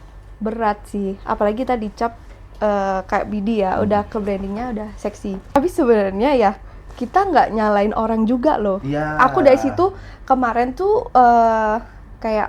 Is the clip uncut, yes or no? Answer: no